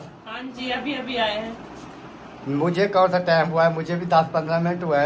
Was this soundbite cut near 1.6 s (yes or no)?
no